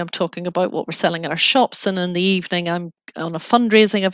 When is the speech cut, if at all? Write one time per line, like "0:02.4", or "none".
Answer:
none